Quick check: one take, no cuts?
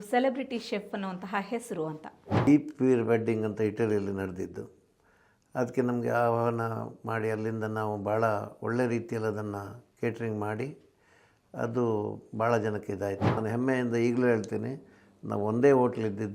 no; 2 cuts; at 2.5 s, 13.3 s

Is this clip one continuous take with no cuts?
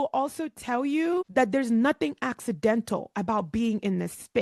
yes; 0 cuts

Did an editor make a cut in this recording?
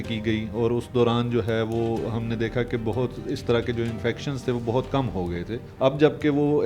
yes; 1 cut; at 5.6 s

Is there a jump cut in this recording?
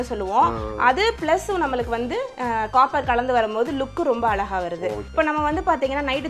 yes; 1 cut; at 5.1 s

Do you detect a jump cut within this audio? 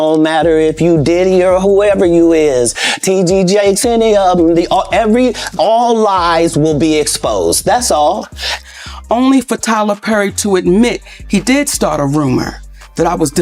yes; 1 cut; at 8.4 s

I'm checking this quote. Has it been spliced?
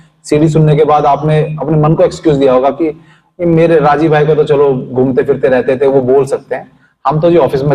no; 0 cuts

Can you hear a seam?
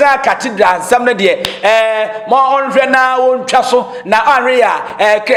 no; 0 cuts

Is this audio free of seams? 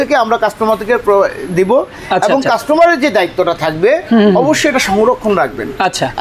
yes; 0 cuts

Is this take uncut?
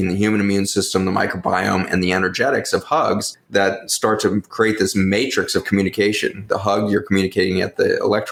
yes; 0 cuts

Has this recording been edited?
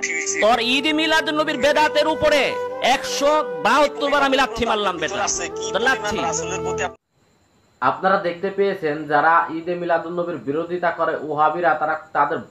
no; 0 cuts

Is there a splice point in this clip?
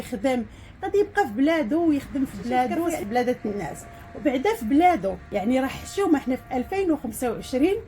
yes; 1 cut; at 5.2 s

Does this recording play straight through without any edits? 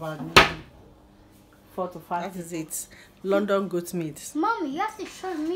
no; 1 cut; at 2.4 s

